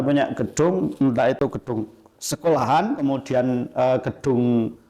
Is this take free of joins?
yes; 0 cuts

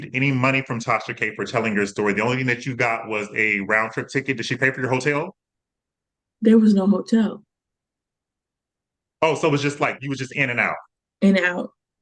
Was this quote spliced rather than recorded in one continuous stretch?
no; 0 cuts

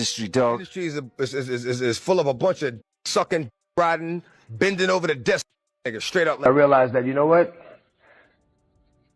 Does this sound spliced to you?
yes; 1 cut; at 6.4 s

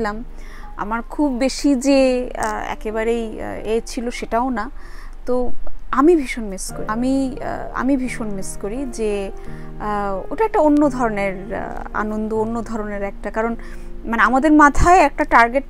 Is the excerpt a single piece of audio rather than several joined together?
yes; 0 cuts

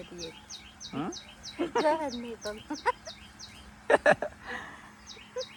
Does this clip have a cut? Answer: no; 0 cuts

